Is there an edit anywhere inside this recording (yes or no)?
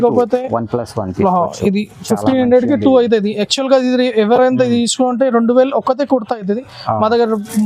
no